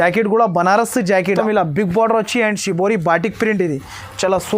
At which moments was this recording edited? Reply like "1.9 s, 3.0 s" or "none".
1.4 s